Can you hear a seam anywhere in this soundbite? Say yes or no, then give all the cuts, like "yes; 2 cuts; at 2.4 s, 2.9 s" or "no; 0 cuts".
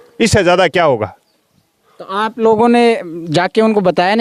no; 0 cuts